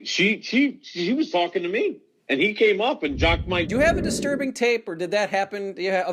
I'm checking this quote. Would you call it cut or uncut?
cut